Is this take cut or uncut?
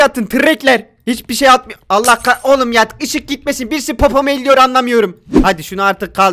cut